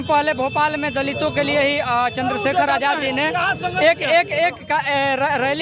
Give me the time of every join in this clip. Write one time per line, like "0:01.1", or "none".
none